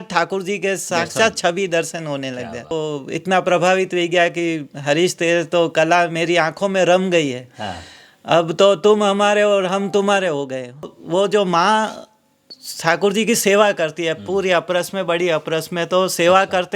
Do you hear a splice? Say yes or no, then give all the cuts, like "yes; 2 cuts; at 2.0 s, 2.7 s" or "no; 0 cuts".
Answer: yes; 2 cuts; at 2.7 s, 11.0 s